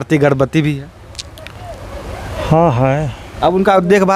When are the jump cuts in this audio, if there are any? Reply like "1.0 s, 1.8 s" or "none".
3.2 s

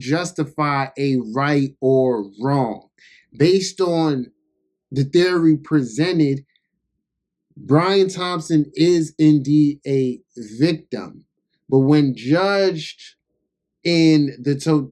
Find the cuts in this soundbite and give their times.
none

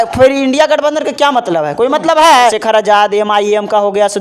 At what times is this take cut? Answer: 2.6 s

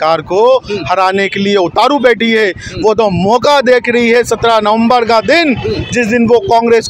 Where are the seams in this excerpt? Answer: none

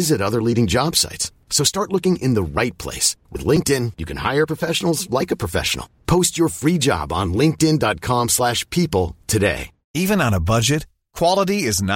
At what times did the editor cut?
none

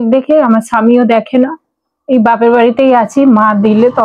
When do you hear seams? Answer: none

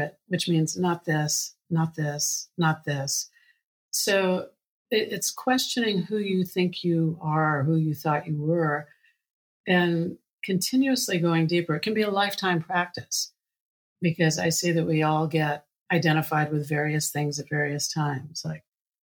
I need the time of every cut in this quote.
none

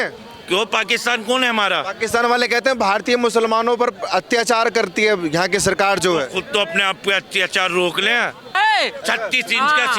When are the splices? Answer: 8.5 s

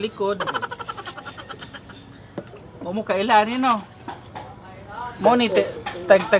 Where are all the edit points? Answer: none

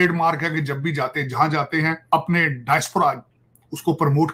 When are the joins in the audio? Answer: 2.1 s

